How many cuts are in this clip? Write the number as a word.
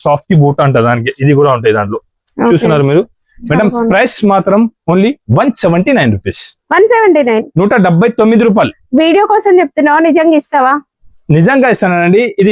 zero